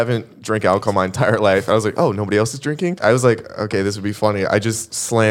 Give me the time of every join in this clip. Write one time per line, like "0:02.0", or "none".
0:03.0